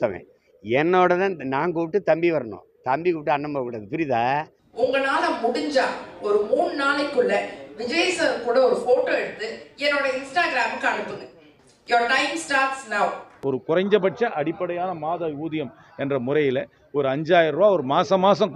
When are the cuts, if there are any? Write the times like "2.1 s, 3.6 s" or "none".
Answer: 4.6 s, 13.3 s